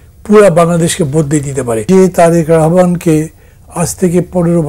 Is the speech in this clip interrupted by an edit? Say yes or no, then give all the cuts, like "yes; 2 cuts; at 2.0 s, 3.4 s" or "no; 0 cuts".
yes; 1 cut; at 1.8 s